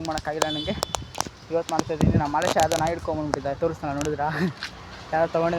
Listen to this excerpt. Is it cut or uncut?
uncut